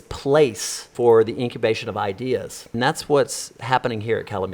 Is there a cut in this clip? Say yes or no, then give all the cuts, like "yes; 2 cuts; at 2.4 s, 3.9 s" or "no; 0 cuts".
yes; 2 cuts; at 0.9 s, 2.7 s